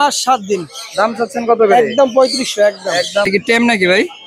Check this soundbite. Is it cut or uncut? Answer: cut